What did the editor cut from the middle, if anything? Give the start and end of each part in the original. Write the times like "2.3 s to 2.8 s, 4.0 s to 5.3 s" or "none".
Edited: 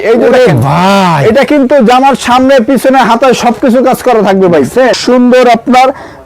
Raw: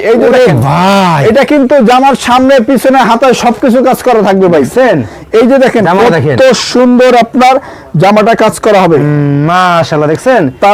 5.0 s to 6.7 s